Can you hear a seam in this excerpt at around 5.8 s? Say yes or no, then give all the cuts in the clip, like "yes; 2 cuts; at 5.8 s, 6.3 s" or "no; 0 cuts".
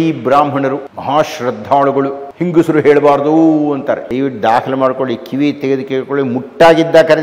no; 3 cuts; at 0.9 s, 2.3 s, 4.1 s